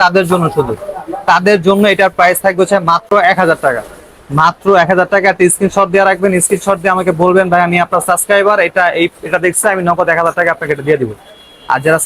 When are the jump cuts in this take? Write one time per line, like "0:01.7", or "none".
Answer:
none